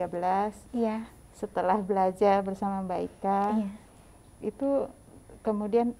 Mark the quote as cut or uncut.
uncut